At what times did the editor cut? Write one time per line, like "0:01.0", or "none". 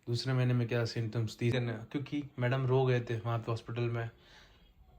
0:01.5